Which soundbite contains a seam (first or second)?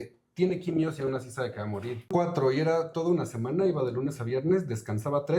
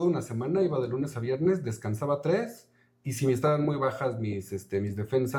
first